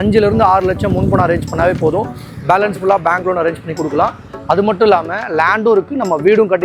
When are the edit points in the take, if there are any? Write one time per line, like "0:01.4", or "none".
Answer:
none